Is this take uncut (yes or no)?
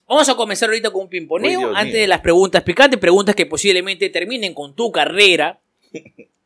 yes